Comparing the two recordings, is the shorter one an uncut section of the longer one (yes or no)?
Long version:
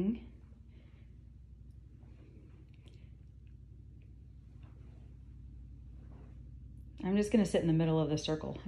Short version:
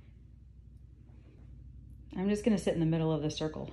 no